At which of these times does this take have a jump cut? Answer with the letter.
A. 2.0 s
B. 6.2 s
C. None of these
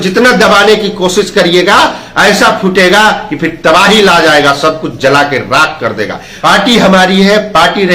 B